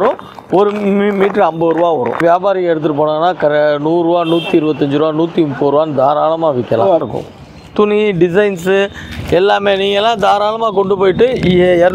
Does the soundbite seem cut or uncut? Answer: cut